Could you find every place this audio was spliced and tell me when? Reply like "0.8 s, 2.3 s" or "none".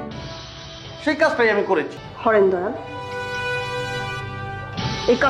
2.0 s